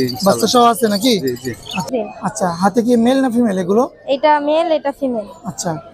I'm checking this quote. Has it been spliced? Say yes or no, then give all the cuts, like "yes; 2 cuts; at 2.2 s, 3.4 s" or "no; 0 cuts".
yes; 1 cut; at 1.9 s